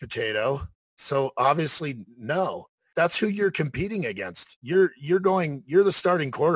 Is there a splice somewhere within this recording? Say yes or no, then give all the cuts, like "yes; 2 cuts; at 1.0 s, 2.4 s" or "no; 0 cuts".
yes; 1 cut; at 2.8 s